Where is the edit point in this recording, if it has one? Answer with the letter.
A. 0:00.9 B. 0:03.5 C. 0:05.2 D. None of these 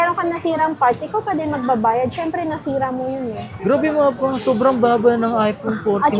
B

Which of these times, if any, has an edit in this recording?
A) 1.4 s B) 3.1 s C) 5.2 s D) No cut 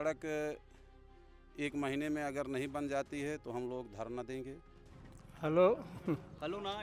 C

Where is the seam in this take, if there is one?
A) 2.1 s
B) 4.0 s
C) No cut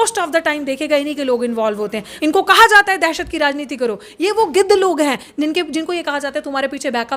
A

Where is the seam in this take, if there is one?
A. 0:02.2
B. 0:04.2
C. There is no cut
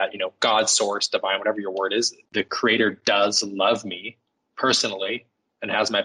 A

